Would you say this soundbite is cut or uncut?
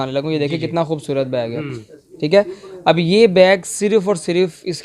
uncut